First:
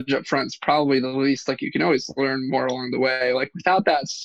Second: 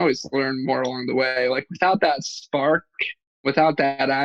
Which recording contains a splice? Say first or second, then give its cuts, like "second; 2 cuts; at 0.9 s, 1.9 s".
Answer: second; 1 cut; at 3.3 s